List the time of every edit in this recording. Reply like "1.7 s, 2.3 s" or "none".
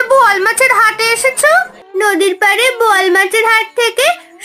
1.8 s